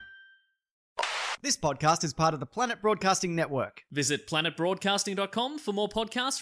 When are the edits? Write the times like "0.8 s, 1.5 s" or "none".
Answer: 0.9 s